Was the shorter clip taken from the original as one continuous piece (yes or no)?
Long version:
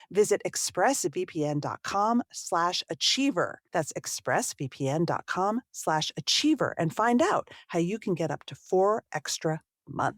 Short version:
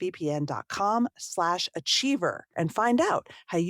no